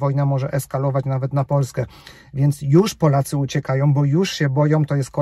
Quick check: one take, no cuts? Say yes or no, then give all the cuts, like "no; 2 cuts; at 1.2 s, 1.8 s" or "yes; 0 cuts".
yes; 0 cuts